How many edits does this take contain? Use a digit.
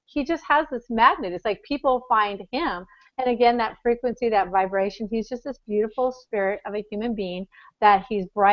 1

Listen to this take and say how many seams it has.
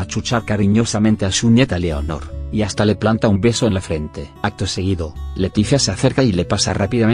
1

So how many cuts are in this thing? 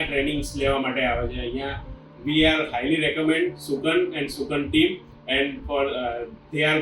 1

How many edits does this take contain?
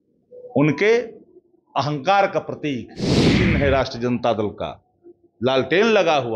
1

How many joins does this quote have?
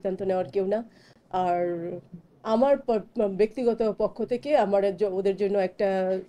0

